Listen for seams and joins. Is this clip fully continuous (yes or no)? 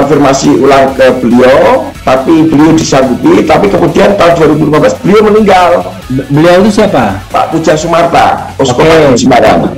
yes